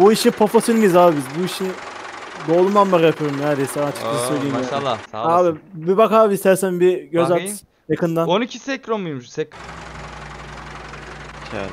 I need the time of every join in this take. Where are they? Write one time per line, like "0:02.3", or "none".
0:05.1
0:09.5